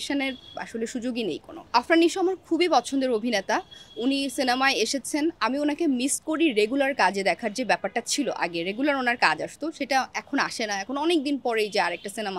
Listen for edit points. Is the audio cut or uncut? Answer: uncut